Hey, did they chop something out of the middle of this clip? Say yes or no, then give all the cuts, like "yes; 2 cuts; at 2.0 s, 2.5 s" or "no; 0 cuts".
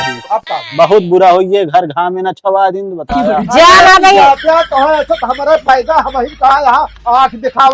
no; 0 cuts